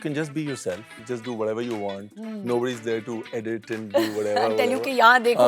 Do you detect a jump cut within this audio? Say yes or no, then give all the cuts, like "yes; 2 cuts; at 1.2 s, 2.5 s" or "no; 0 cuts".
yes; 1 cut; at 0.9 s